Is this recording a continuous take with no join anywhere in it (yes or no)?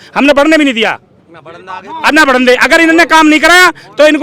yes